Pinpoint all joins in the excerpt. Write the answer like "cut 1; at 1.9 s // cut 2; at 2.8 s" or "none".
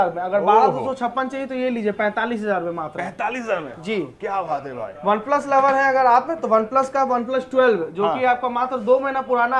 none

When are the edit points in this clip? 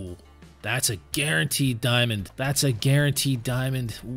cut 1; at 2.3 s

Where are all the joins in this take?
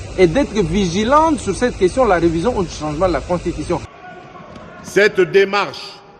cut 1; at 3.9 s

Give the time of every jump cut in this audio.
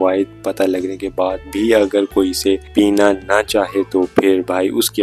none

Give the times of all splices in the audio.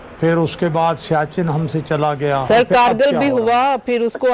cut 1; at 2.4 s

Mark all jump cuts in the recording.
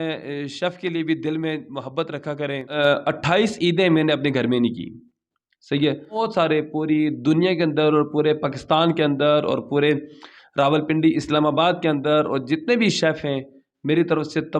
cut 1; at 2.7 s // cut 2; at 6.2 s

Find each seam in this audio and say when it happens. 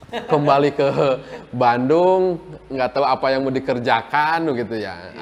none

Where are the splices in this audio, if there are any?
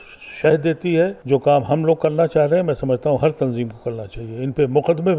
cut 1; at 1.2 s

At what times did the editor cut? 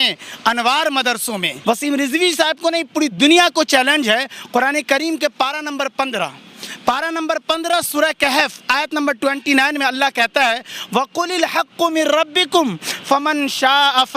cut 1; at 1.5 s

